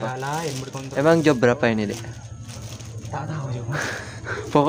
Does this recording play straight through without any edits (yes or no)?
no